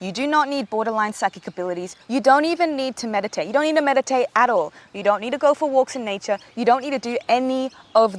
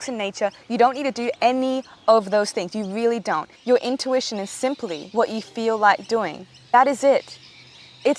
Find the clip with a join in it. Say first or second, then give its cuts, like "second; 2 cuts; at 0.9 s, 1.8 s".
second; 3 cuts; at 3.5 s, 5.0 s, 6.7 s